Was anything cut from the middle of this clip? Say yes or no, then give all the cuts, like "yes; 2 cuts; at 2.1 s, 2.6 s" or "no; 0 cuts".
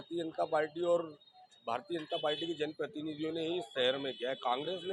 no; 0 cuts